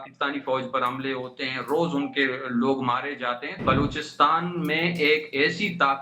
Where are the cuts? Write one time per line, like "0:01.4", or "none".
0:03.6